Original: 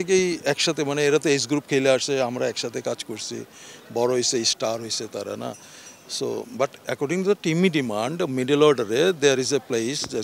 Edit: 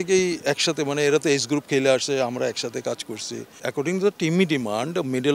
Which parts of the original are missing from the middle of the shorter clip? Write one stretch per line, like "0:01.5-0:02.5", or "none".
0:03.5-0:06.8